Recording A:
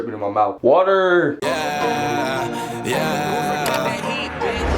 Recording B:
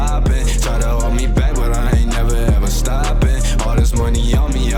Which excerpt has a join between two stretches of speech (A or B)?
A